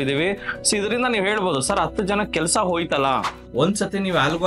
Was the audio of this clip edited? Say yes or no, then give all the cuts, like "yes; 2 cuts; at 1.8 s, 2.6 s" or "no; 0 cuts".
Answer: yes; 1 cut; at 3.4 s